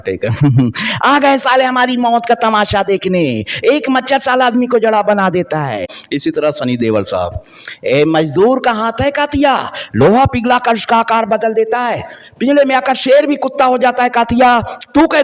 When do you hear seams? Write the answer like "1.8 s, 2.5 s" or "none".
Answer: 5.9 s

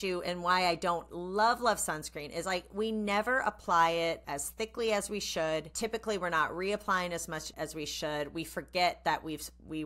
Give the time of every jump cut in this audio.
4.3 s, 5.7 s, 7.5 s

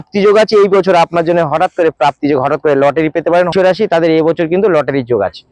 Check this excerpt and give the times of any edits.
3.5 s

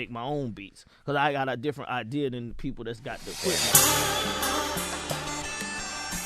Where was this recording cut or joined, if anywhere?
3.6 s

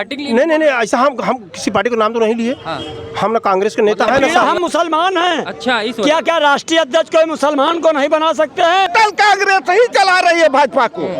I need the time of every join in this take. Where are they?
4.3 s, 8.9 s

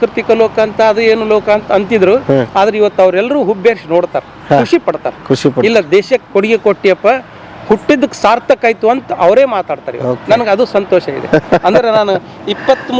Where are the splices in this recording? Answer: none

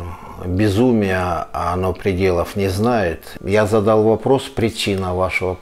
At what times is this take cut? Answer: 3.3 s

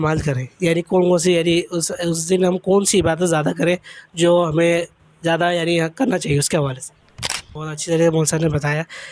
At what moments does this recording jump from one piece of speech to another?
7.5 s

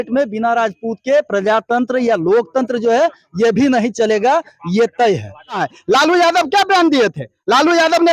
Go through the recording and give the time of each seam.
5.7 s

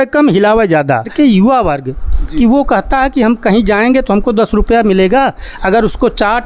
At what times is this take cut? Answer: 1.1 s

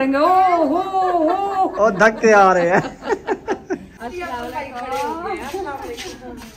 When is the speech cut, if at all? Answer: 4.0 s

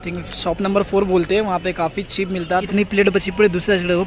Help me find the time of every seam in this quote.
2.7 s

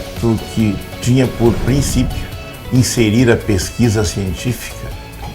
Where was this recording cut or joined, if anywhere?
0.9 s

